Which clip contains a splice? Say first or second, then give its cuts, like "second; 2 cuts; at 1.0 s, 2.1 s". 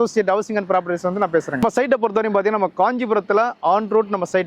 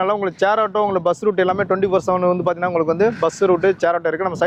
first; 1 cut; at 1.6 s